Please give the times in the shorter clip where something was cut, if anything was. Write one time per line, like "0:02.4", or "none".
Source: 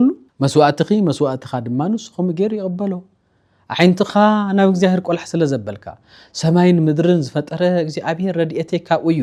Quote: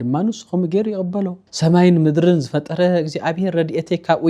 0:01.4

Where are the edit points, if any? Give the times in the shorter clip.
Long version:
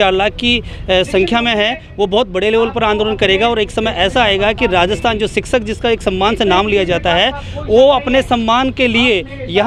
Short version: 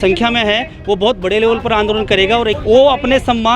0:02.6

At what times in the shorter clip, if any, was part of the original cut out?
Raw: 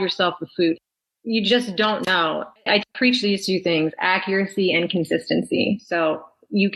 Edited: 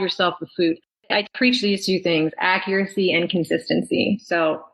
0:01.2

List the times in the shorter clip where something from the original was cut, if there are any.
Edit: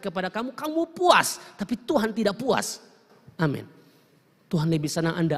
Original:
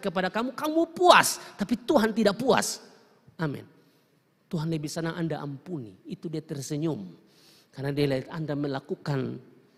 none

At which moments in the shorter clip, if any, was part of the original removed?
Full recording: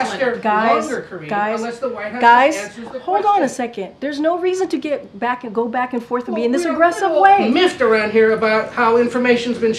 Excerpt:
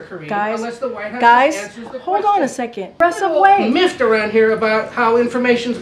0:03.0

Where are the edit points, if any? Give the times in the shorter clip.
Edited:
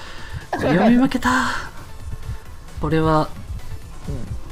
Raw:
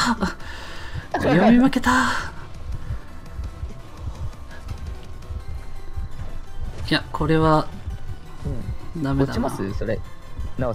0:02.8

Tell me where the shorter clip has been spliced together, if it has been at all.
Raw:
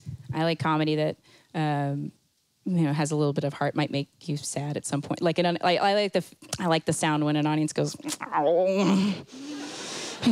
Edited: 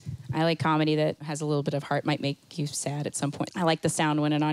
0:01.3
0:03.4

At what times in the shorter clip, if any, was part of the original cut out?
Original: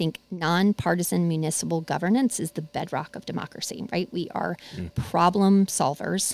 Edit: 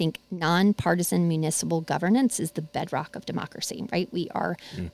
none

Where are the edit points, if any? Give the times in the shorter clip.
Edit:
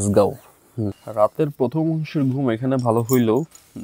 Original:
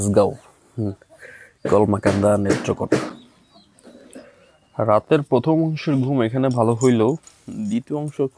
0:01.0

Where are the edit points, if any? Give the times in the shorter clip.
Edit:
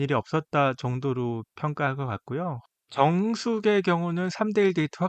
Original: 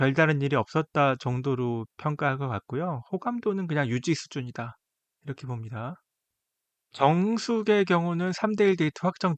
0:02.6

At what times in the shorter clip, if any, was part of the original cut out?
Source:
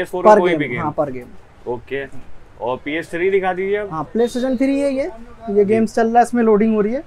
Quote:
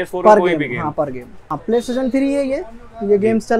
0:01.5

